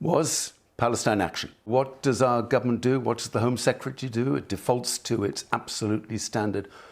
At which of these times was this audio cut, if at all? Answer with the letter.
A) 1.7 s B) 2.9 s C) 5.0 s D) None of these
A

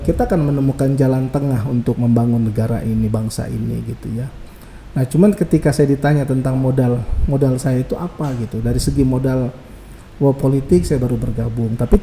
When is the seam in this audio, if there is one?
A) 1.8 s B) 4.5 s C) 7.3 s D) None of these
D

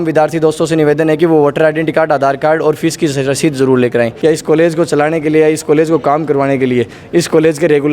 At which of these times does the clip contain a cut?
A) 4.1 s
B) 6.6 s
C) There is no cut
A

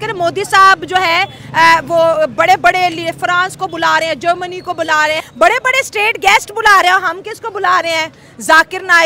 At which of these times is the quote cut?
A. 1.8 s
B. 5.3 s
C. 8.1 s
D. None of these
B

